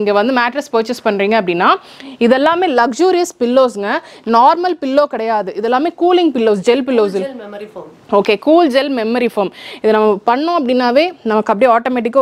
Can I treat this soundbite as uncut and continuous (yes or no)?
yes